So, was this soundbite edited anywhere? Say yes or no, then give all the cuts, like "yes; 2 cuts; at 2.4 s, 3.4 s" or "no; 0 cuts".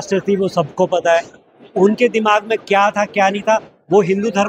no; 0 cuts